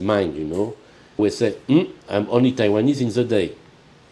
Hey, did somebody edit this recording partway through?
yes; 1 cut; at 1.2 s

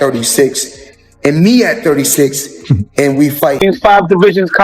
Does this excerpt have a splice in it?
yes; 1 cut; at 3.6 s

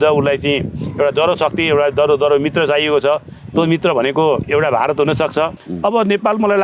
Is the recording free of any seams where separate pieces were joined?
no; 2 cuts; at 4.4 s, 5.6 s

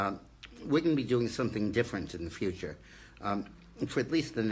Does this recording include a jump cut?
no; 0 cuts

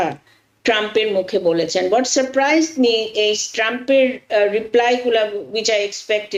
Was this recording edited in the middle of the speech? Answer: no; 0 cuts

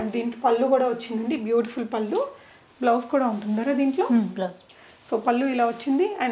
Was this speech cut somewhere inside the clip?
no; 0 cuts

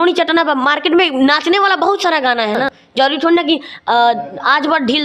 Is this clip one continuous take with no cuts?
yes; 0 cuts

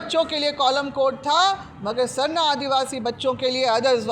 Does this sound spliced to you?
no; 0 cuts

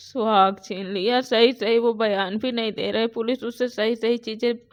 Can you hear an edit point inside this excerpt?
no; 0 cuts

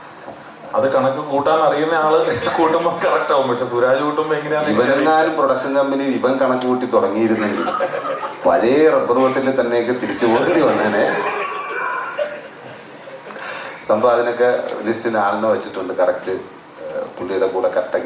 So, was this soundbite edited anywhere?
no; 0 cuts

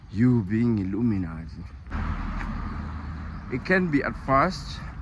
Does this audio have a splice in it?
yes; 1 cut; at 1.9 s

